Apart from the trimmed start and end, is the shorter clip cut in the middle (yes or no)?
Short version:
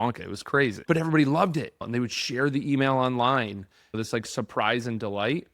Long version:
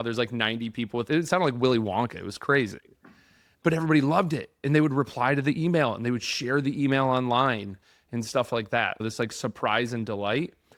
yes